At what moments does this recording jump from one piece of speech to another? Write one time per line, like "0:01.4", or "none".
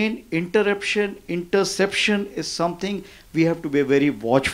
none

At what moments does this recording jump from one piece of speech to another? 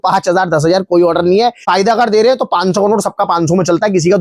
0:01.7

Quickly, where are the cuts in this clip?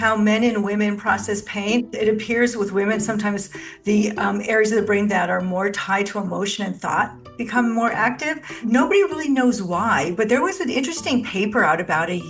0:01.9
0:08.4

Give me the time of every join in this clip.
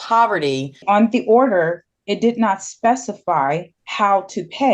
0:00.8
0:03.8

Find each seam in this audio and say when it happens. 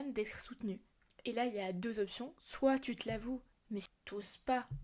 0:03.9

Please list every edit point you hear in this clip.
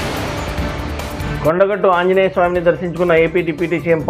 0:01.2

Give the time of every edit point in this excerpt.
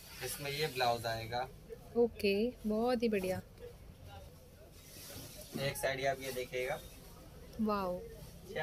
0:04.3

